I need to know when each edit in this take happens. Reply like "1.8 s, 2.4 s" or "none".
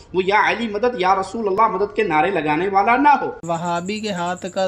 3.4 s